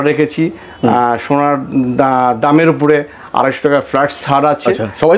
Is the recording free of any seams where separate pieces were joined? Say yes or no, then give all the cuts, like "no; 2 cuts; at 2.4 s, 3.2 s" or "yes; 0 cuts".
yes; 0 cuts